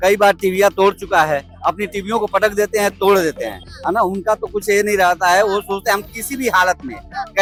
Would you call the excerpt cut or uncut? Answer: uncut